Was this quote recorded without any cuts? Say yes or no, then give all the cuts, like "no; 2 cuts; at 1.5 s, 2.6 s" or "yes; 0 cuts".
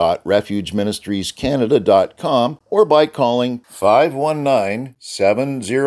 no; 1 cut; at 2.6 s